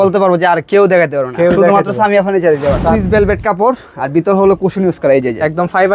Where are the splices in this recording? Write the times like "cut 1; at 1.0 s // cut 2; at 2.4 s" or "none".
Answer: cut 1; at 2.9 s